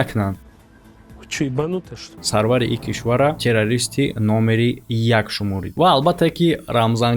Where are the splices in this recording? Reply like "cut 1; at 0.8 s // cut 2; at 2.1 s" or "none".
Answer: cut 1; at 2.1 s